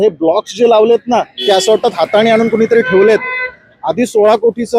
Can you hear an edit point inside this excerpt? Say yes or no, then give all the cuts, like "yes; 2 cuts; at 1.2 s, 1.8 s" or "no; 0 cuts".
no; 0 cuts